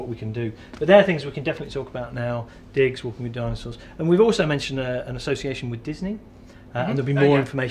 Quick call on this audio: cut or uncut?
uncut